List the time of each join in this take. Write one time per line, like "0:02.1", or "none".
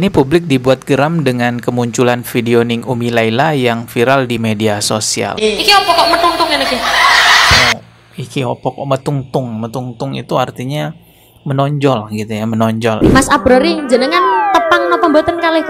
0:05.3
0:13.0